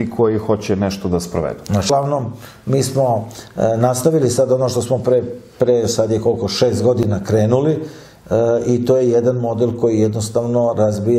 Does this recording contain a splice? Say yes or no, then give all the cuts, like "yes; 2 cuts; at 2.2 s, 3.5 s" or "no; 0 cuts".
yes; 1 cut; at 1.9 s